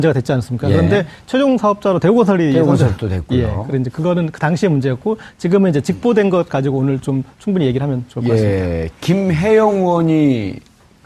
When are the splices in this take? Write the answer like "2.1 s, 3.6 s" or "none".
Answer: 2.0 s